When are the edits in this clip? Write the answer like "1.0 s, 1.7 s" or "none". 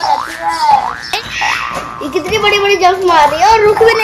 1.0 s